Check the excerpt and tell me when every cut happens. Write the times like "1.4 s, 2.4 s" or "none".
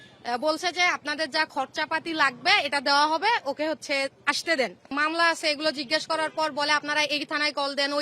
4.9 s